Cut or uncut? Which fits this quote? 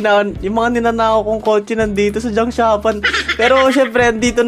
uncut